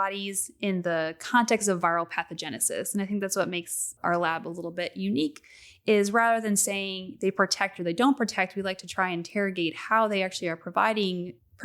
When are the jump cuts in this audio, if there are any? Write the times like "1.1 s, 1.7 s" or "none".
3.9 s